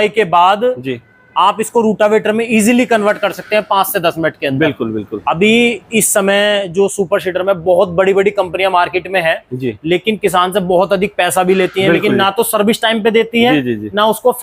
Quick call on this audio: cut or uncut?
uncut